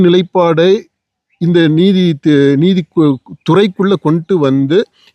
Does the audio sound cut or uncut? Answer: uncut